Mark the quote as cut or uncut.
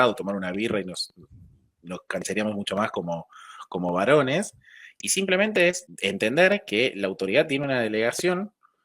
cut